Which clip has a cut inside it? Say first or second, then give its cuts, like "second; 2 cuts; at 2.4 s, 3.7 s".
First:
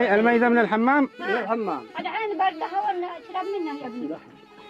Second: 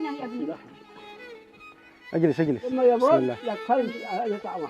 second; 1 cut; at 2.7 s